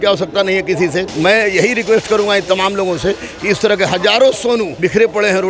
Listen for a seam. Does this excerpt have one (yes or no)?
yes